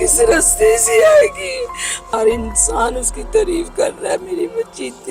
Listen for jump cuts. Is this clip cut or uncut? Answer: cut